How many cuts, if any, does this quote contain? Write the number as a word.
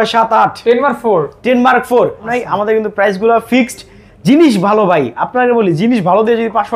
one